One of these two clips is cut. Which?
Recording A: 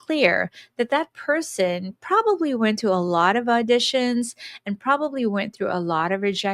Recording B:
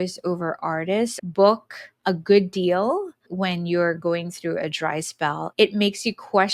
B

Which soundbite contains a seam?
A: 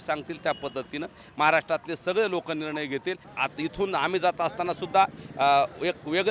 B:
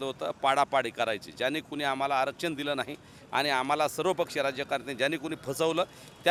A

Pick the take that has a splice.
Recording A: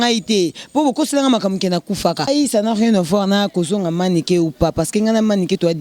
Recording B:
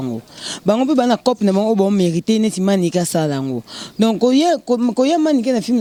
A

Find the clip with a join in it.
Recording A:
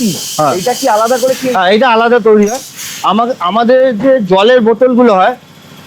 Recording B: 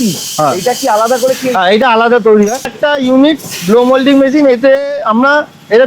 B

